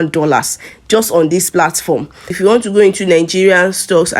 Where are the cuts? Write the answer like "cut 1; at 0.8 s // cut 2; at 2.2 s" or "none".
cut 1; at 2.3 s